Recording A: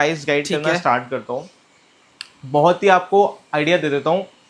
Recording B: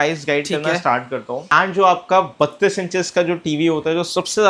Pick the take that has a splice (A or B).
B